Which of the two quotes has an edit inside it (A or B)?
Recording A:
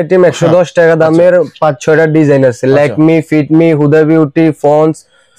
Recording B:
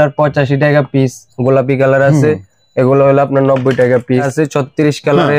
B